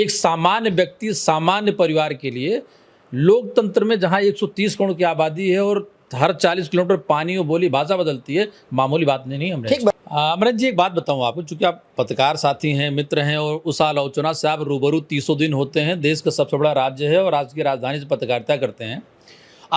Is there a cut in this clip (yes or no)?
yes